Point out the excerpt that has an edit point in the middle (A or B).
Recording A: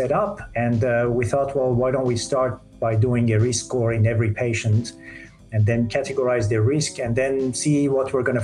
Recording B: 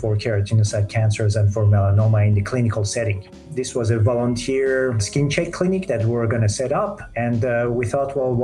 B